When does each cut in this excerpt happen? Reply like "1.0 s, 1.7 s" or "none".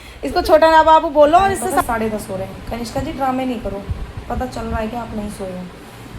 1.8 s